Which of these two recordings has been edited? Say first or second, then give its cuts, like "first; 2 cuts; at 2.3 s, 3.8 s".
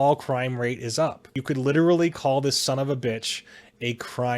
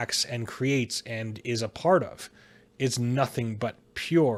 first; 1 cut; at 1.3 s